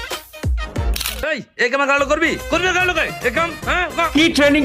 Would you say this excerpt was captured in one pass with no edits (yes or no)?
no